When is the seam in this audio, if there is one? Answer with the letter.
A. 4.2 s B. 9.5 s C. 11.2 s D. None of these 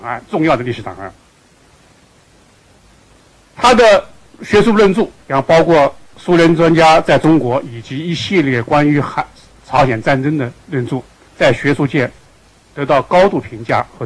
C